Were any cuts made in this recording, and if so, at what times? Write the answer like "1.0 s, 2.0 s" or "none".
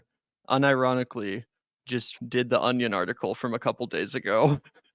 2.1 s